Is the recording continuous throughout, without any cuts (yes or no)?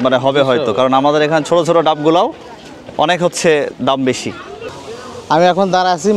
no